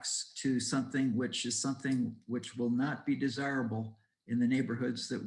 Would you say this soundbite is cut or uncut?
uncut